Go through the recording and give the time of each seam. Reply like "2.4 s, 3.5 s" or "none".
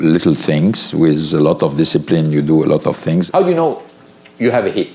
3.3 s